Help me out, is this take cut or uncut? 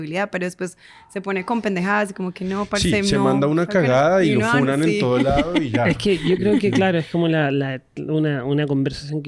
uncut